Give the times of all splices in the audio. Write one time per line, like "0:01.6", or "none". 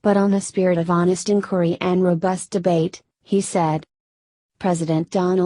0:03.9